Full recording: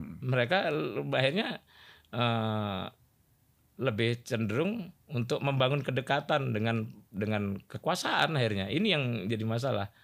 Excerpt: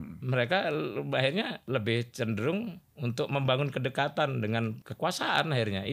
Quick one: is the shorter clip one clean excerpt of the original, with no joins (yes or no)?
no